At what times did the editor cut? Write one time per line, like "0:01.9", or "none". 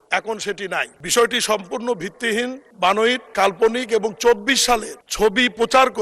0:01.0
0:02.6
0:03.2
0:05.0

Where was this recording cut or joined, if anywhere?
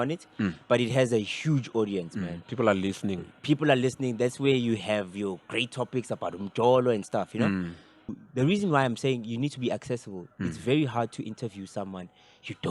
0:08.0

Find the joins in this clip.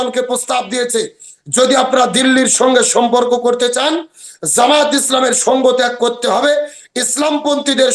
none

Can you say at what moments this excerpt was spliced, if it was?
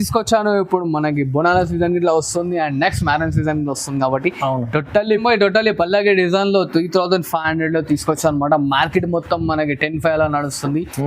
0:05.2

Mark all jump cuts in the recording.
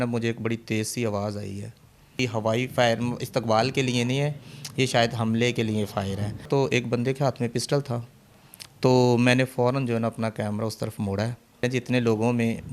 0:02.2
0:06.5
0:11.6

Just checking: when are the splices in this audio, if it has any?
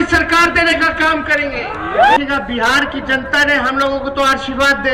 0:02.2

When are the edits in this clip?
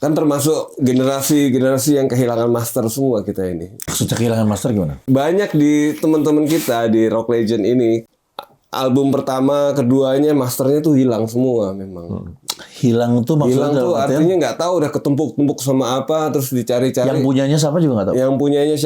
0:03.8
0:05.0
0:08.1

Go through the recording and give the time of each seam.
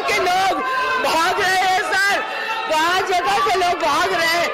none

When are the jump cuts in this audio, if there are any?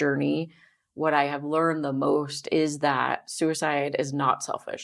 none

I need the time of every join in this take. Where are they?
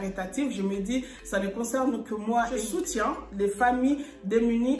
0:02.6

